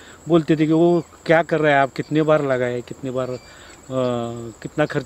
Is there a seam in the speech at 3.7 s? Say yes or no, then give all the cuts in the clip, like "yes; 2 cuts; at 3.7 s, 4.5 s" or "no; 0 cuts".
no; 0 cuts